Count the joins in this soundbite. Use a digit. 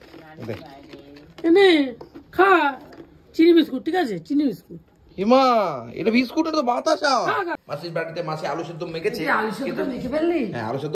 1